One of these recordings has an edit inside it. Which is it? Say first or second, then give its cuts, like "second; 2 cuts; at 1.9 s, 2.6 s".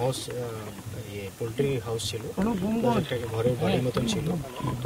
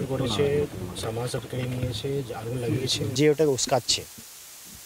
second; 1 cut; at 3.1 s